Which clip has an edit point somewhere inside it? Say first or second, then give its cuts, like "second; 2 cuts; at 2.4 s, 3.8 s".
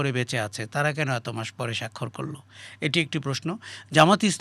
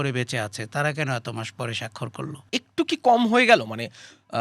second; 1 cut; at 2.4 s